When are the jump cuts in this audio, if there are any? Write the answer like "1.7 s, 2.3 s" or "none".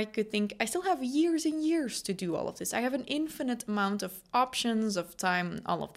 none